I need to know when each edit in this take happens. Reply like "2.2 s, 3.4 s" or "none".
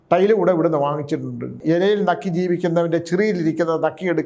1.6 s